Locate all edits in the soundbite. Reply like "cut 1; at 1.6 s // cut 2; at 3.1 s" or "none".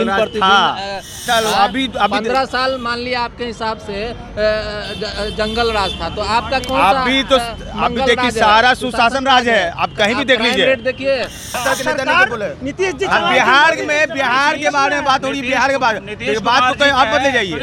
cut 1; at 1.2 s // cut 2; at 11.6 s

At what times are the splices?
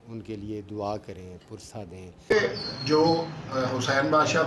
cut 1; at 2.3 s

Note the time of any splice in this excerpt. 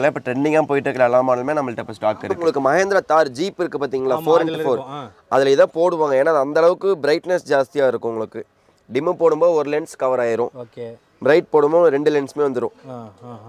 cut 1; at 2.4 s

